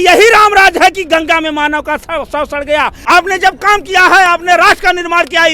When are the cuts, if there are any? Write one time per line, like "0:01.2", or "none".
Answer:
0:03.0